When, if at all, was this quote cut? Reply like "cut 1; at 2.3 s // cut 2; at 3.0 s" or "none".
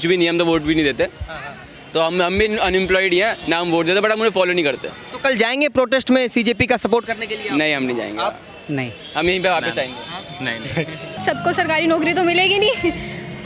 cut 1; at 11.2 s